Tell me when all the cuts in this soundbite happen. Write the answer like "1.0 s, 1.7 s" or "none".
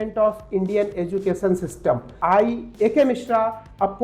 2.1 s